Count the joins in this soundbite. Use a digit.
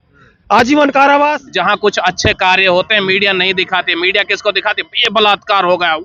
1